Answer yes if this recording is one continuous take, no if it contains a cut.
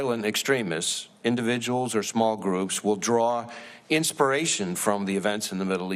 yes